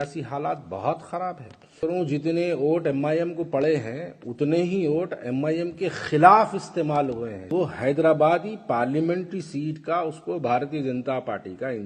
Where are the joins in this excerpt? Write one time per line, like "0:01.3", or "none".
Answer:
0:01.8
0:07.5